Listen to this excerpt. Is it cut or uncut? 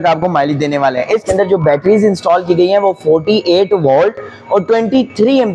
cut